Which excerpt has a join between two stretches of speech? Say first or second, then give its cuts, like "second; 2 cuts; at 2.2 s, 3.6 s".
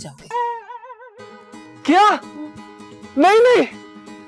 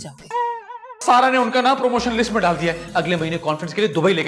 second; 1 cut; at 1.0 s